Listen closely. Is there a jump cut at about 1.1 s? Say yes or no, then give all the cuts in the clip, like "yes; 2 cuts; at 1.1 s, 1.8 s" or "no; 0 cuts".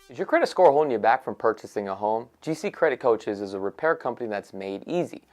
yes; 1 cut; at 1.1 s